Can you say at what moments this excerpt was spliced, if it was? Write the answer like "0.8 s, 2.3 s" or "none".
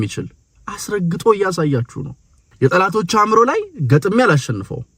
2.4 s